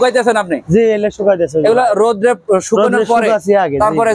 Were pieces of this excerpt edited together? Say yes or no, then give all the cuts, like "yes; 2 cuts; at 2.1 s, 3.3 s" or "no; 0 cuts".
no; 0 cuts